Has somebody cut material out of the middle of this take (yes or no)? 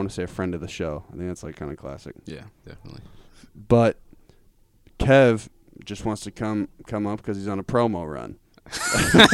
no